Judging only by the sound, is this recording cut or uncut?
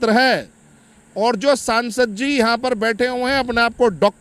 uncut